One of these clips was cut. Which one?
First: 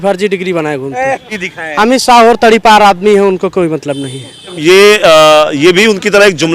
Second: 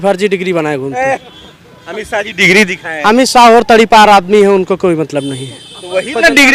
first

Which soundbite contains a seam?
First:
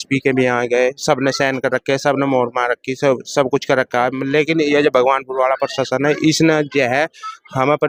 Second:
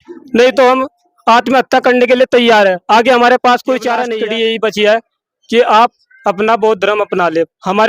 second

